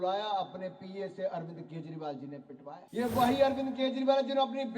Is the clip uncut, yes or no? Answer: no